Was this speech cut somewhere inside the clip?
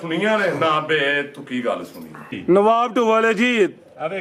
yes; 1 cut; at 2.3 s

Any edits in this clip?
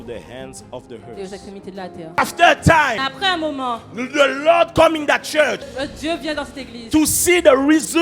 yes; 3 cuts; at 2.2 s, 3.0 s, 5.7 s

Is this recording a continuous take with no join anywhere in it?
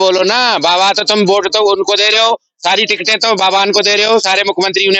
yes; 0 cuts

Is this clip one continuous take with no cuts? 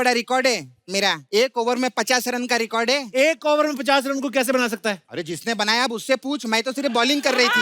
no; 2 cuts; at 1.2 s, 5.0 s

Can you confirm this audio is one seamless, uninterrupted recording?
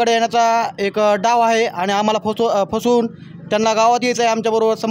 yes; 0 cuts

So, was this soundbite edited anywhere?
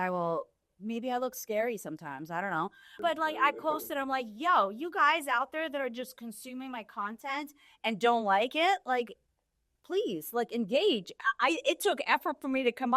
yes; 1 cut; at 2.9 s

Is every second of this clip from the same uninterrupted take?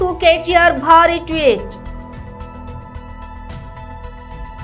no; 1 cut; at 2.2 s

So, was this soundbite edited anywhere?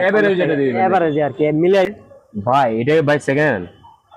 yes; 1 cut; at 1.9 s

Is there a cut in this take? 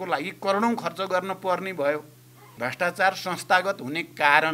yes; 1 cut; at 2.5 s

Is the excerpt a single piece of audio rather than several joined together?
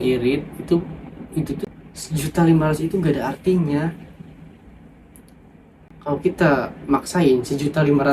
no; 1 cut; at 1.6 s

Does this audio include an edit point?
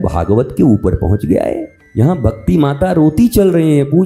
yes; 1 cut; at 1.8 s

